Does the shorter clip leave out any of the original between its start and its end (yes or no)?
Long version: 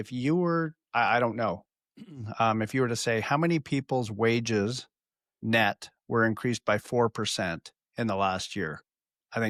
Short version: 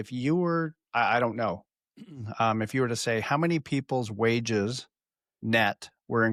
no